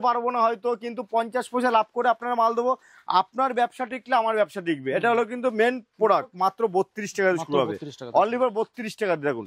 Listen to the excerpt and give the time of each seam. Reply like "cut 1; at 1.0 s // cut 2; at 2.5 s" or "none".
cut 1; at 6.3 s